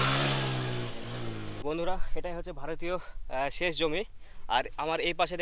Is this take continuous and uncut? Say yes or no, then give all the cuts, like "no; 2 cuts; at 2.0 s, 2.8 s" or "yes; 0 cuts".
no; 1 cut; at 1.6 s